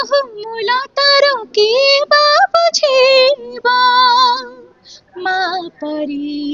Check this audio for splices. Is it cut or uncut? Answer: uncut